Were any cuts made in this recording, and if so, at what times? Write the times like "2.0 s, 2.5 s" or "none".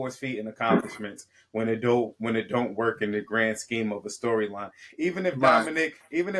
none